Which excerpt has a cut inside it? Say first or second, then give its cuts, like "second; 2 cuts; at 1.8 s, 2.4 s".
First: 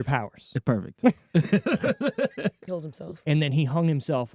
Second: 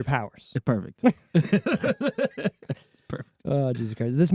first; 1 cut; at 2.6 s